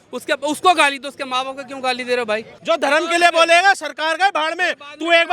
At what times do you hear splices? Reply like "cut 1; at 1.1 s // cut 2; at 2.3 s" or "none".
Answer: cut 1; at 2.5 s